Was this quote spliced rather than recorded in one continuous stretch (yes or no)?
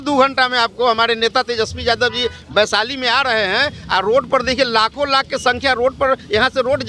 no